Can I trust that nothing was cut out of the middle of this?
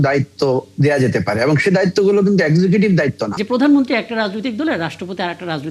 no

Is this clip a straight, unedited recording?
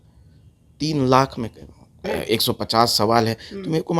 no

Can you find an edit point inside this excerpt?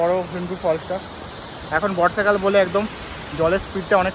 no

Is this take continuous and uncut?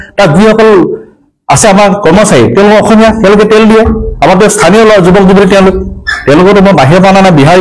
yes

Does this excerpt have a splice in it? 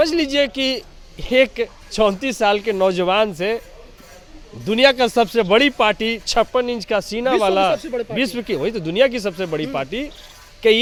no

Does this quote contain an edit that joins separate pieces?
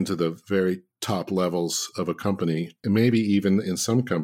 yes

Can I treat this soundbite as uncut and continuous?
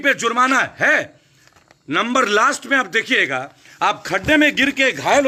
yes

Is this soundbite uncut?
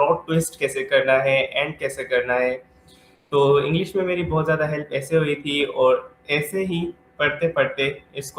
yes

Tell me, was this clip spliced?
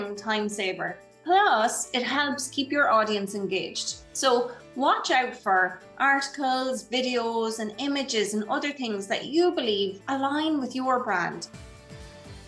yes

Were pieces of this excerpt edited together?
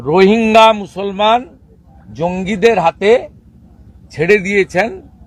no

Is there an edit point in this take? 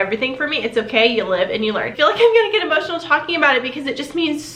yes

